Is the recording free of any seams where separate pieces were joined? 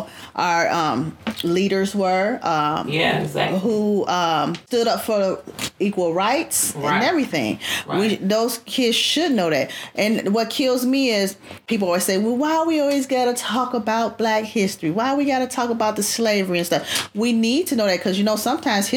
no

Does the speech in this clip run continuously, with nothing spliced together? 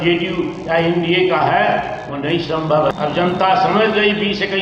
no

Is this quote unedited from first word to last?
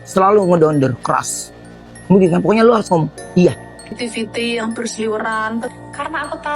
no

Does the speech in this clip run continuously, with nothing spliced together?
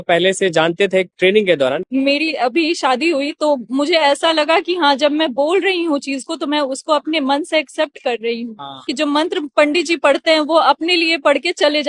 no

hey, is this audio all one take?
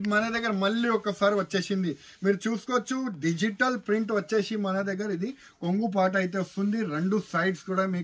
yes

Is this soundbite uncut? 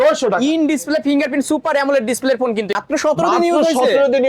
no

